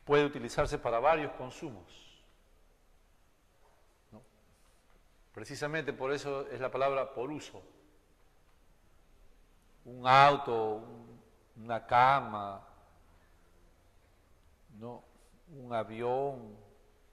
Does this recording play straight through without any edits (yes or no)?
yes